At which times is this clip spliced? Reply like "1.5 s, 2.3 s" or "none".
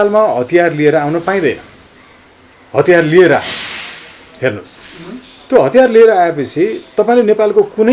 none